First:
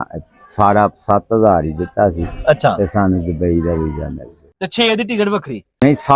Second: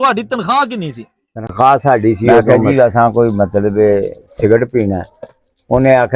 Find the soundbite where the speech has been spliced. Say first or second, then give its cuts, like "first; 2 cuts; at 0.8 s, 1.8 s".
second; 1 cut; at 2.4 s